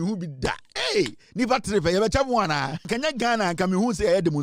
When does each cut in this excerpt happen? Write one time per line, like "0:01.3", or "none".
0:02.8